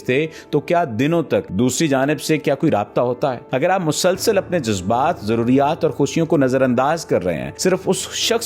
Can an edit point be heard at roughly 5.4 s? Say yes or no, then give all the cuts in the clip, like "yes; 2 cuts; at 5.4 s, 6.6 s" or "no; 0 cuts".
no; 3 cuts; at 1.5 s, 3.4 s, 7.5 s